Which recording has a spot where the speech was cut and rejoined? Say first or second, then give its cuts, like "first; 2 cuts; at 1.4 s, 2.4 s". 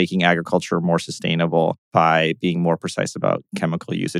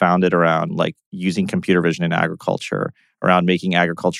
first; 1 cut; at 1.8 s